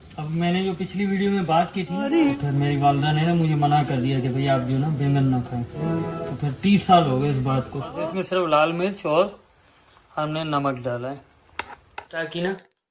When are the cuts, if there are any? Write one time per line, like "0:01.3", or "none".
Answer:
0:02.1
0:07.9
0:11.9